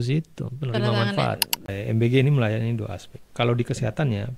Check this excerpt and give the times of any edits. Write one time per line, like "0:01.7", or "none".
0:01.6